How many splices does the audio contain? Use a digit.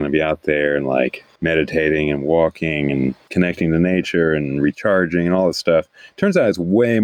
2